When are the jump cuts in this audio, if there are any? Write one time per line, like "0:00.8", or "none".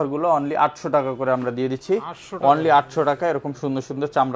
none